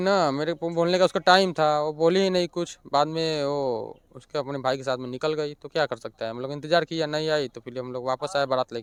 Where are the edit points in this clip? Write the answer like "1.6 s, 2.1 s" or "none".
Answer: none

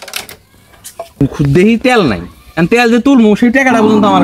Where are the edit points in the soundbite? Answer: 1.2 s

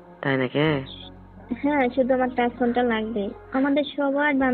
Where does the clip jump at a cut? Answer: none

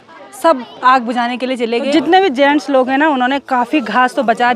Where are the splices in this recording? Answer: 1.9 s

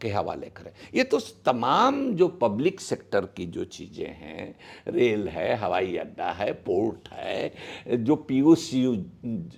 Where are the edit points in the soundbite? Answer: none

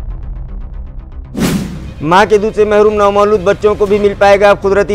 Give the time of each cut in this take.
none

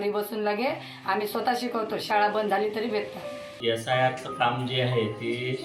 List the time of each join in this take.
3.4 s

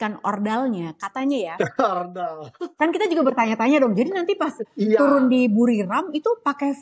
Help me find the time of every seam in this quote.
none

